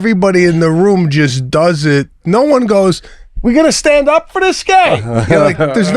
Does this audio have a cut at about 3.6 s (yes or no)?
no